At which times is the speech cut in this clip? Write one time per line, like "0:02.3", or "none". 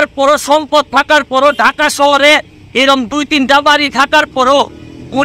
none